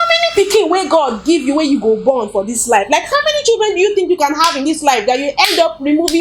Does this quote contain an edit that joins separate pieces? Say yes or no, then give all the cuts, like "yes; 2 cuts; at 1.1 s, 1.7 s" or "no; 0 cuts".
no; 0 cuts